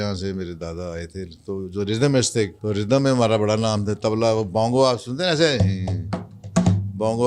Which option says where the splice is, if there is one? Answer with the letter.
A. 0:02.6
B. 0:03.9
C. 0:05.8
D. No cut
A